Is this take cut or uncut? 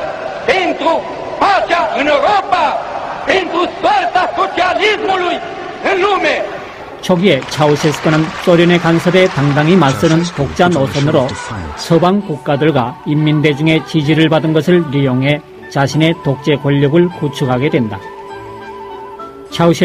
cut